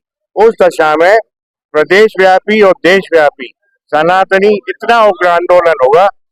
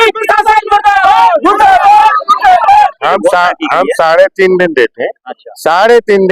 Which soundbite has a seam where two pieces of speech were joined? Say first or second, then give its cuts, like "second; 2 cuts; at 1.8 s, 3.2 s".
second; 1 cut; at 3.0 s